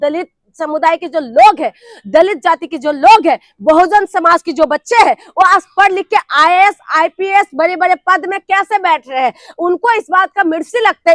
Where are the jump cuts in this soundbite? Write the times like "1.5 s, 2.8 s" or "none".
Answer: none